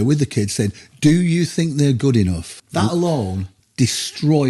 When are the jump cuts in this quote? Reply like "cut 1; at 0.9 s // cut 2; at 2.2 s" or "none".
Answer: none